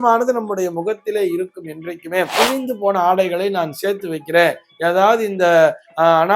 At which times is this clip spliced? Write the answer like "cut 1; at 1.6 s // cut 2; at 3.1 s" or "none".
cut 1; at 2.3 s